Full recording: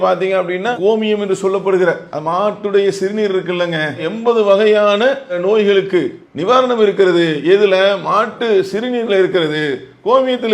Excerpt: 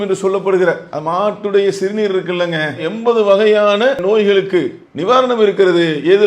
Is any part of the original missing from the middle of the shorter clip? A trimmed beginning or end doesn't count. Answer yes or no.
yes